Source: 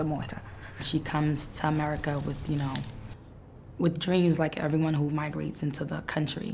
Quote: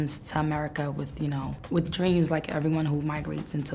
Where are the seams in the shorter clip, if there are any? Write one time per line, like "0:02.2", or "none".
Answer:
0:01.6